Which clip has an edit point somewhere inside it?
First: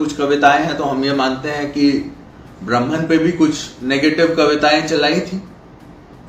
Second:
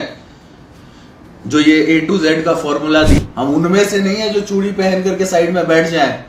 second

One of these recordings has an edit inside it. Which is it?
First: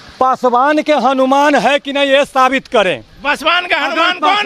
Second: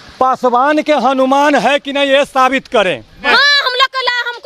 second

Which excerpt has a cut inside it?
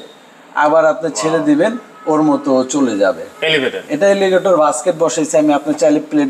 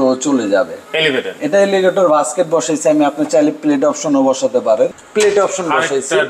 second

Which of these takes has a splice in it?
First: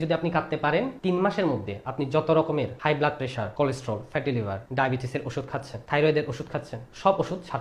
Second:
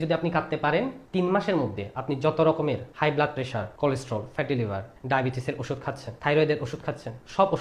first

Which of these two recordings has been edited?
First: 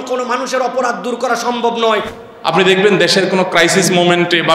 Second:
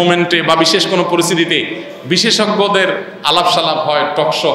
first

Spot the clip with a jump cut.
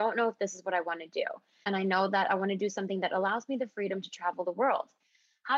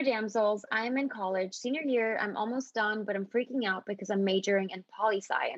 first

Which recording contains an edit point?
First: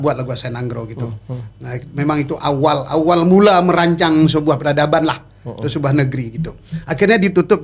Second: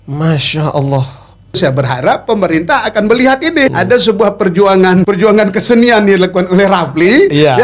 second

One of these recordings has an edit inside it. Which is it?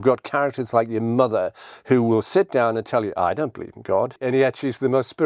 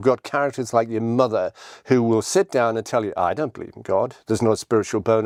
first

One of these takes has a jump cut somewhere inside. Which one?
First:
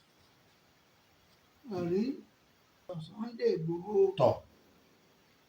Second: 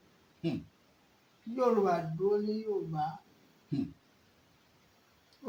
first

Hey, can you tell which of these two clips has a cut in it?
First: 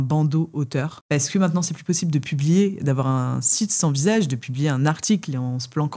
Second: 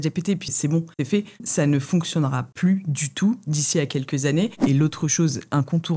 second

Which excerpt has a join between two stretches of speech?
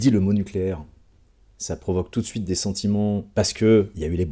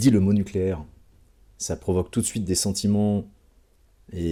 first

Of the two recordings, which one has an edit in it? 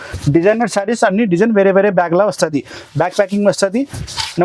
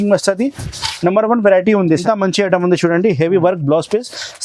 second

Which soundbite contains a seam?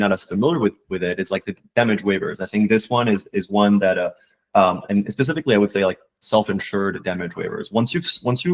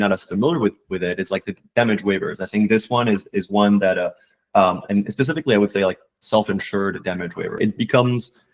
second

